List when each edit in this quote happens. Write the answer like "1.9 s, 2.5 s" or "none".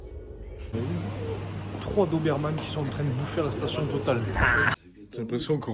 0.7 s, 4.9 s